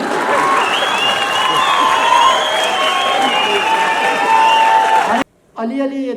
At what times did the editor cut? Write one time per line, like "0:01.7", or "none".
0:05.2